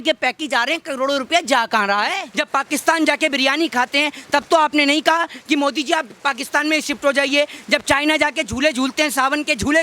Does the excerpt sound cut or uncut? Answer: cut